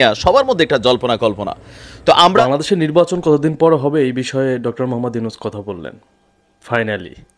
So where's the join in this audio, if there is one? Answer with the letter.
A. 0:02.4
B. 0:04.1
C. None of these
A